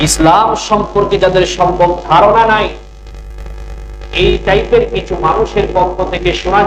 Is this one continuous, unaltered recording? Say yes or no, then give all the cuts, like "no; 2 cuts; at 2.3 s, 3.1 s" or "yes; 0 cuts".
yes; 0 cuts